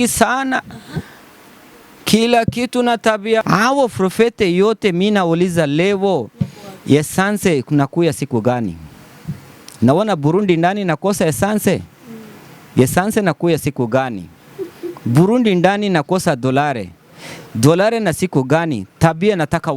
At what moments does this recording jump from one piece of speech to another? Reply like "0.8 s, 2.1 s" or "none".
3.4 s